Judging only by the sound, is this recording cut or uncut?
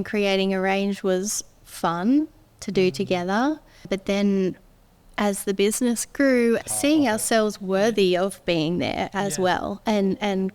cut